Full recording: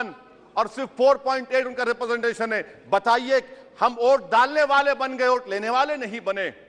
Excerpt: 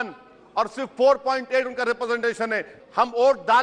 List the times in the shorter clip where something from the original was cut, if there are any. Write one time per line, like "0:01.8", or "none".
0:02.7